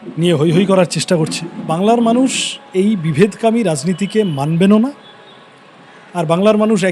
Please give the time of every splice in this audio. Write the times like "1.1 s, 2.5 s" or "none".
1.7 s